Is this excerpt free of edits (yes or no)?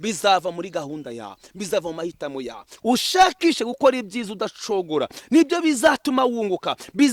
no